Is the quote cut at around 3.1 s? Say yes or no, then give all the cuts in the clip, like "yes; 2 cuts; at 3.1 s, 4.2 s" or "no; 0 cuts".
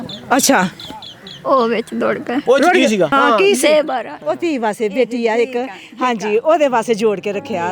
yes; 2 cuts; at 2.4 s, 3.1 s